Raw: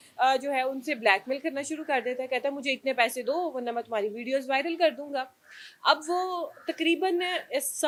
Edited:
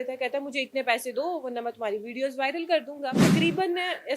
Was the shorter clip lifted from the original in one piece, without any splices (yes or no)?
no